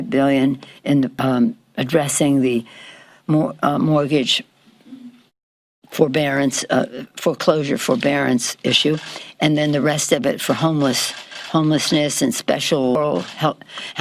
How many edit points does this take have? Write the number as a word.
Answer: two